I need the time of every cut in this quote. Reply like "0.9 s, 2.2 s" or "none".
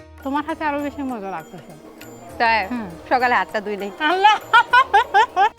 none